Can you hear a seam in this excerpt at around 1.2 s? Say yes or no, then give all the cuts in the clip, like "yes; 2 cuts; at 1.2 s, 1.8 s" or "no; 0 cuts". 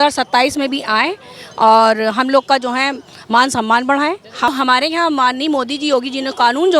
no; 1 cut; at 4.5 s